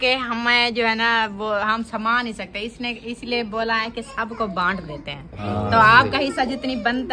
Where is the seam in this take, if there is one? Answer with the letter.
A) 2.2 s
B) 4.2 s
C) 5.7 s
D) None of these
D